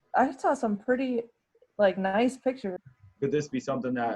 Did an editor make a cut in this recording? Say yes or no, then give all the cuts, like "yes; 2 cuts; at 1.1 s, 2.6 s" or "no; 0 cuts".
yes; 1 cut; at 2.8 s